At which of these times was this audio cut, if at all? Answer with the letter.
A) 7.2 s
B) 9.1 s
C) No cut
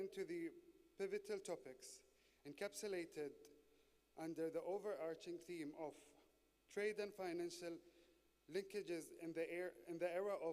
B